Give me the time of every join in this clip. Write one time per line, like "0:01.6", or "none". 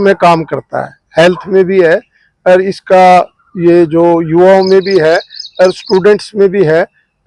none